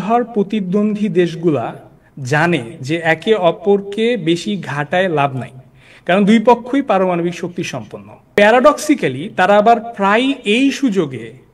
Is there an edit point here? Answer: yes; 1 cut; at 8.4 s

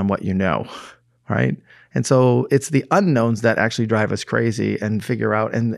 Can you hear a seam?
no; 0 cuts

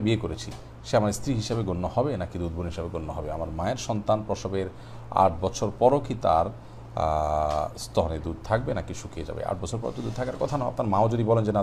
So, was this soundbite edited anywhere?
no; 0 cuts

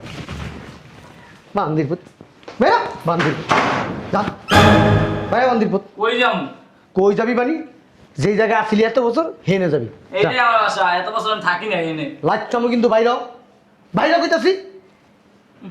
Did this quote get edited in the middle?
no; 0 cuts

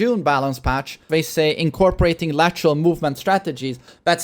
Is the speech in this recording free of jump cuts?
no; 1 cut; at 1.1 s

